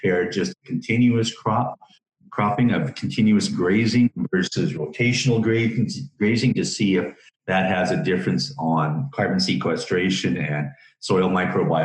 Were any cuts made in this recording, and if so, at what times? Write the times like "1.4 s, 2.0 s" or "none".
none